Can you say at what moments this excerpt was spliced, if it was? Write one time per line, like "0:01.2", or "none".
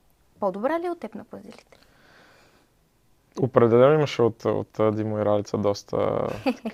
none